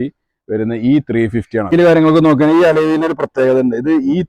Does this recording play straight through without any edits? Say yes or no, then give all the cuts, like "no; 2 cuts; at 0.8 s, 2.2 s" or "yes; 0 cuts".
no; 1 cut; at 1.7 s